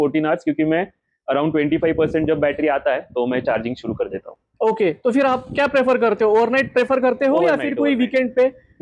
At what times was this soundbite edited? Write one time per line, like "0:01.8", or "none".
none